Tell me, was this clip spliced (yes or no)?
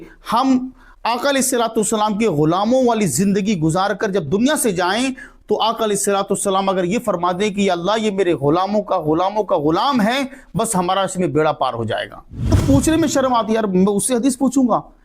yes